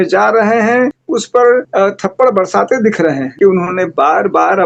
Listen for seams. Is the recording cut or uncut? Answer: cut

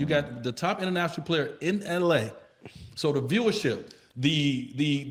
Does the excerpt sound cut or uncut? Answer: uncut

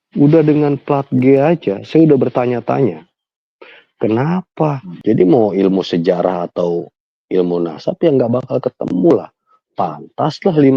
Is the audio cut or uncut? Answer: cut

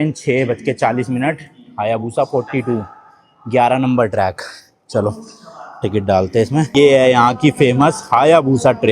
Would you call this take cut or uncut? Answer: cut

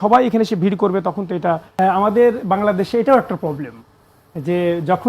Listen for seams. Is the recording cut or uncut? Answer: cut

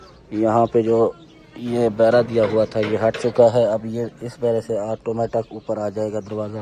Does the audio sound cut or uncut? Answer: uncut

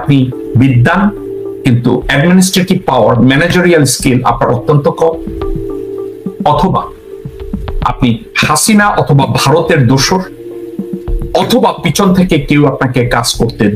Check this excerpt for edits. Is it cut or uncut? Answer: uncut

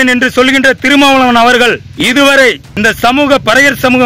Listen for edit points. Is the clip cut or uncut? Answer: cut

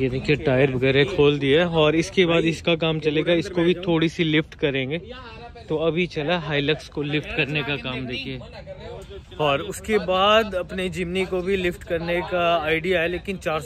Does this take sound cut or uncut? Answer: uncut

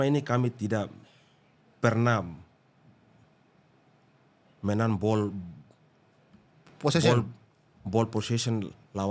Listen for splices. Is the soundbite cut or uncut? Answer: uncut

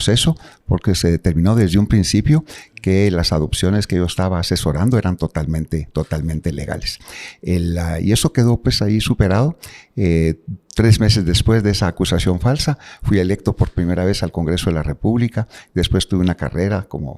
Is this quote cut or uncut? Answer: uncut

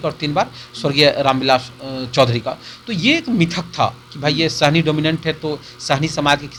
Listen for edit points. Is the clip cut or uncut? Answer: uncut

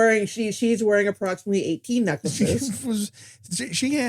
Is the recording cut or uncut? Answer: cut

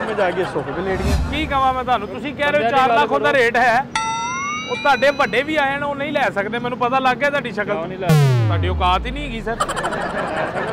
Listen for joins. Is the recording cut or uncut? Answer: cut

